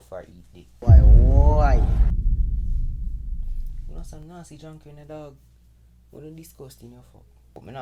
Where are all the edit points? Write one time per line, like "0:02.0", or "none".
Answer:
none